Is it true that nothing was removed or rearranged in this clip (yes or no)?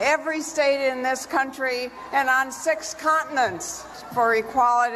no